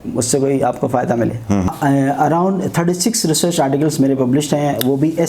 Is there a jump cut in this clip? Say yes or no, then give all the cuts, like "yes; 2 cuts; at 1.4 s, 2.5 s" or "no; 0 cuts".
yes; 1 cut; at 1.7 s